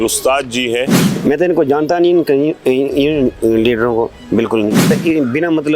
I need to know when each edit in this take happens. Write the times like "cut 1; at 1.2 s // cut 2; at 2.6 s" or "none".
cut 1; at 1.0 s // cut 2; at 4.9 s